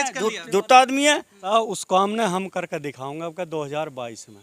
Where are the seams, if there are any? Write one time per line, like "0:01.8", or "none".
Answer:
0:01.4